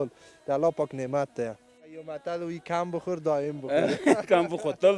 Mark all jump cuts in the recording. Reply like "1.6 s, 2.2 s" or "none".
2.0 s